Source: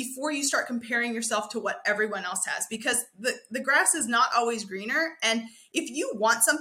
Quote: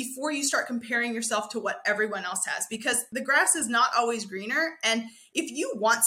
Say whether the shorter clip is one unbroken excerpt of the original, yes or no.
no